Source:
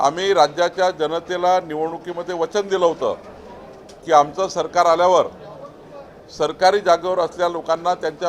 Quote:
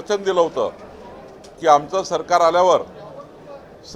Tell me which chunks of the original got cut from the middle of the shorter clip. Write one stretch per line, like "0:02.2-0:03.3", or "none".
none